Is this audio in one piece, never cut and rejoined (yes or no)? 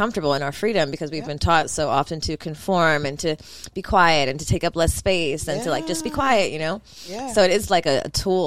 yes